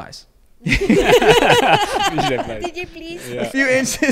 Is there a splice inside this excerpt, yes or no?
no